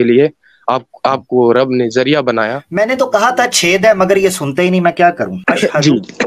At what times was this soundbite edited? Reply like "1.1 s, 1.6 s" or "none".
2.6 s, 5.4 s